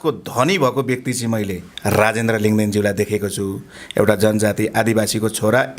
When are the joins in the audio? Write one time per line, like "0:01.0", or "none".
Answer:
0:01.7

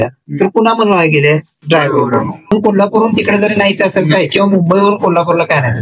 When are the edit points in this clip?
0:02.5

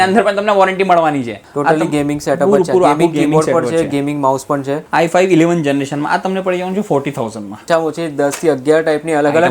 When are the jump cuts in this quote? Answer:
0:01.5
0:04.8
0:07.7

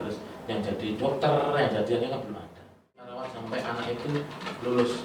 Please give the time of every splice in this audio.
0:03.1

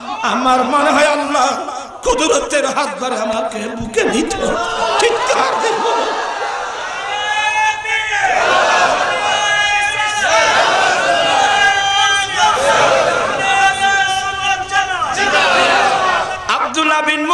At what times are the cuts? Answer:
0:16.4

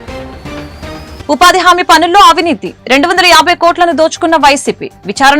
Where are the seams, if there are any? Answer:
0:01.1

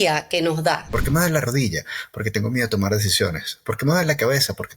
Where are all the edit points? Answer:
0:00.9

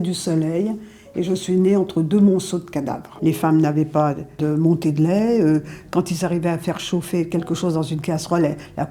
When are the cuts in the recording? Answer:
0:03.0
0:04.4

